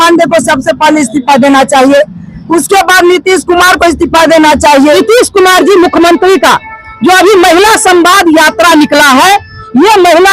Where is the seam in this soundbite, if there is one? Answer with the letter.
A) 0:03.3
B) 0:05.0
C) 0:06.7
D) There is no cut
B